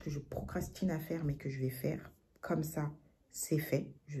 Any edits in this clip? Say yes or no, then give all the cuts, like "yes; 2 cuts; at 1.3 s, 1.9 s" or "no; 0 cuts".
no; 0 cuts